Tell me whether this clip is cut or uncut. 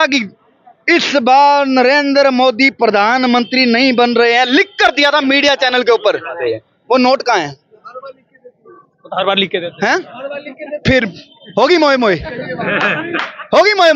uncut